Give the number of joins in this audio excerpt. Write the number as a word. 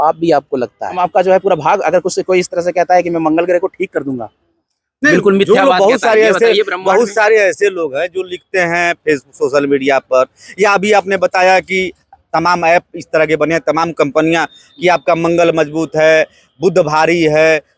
one